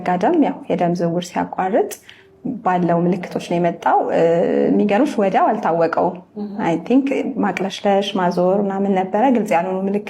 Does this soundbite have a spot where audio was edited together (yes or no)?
no